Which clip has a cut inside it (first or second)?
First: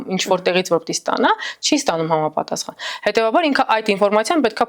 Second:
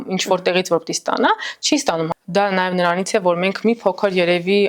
second